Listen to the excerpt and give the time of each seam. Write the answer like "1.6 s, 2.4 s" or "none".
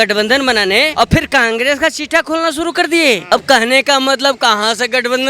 0.9 s, 3.2 s

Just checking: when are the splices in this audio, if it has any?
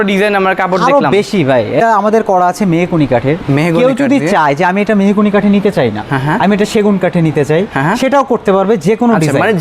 1.8 s

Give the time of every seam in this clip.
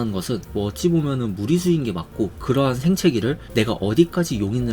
none

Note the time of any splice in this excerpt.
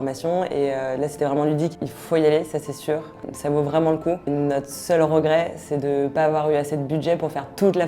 1.7 s, 3.2 s, 4.3 s

